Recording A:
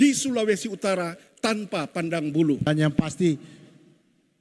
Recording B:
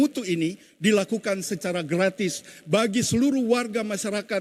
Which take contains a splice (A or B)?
A